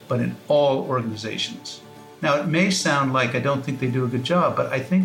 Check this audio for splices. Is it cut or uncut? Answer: uncut